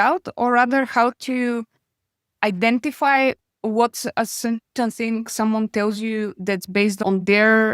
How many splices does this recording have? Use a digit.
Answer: 1